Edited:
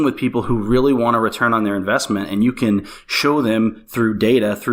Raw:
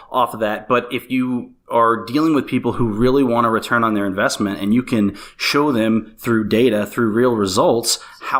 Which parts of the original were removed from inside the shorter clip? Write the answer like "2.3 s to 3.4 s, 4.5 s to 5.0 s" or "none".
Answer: none